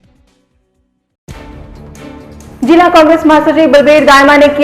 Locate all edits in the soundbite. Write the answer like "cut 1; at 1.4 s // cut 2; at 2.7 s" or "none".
cut 1; at 1.1 s // cut 2; at 2.5 s